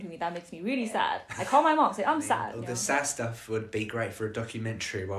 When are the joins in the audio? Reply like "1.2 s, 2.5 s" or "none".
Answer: 1.3 s, 2.5 s